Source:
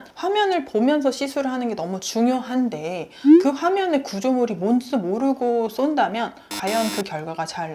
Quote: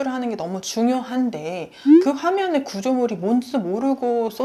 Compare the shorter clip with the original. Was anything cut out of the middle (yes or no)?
no